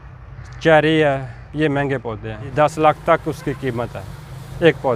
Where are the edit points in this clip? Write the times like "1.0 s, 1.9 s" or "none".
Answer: 2.4 s